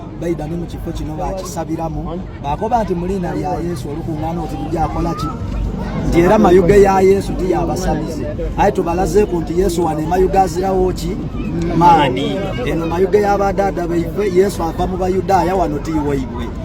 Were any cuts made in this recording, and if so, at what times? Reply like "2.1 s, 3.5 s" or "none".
none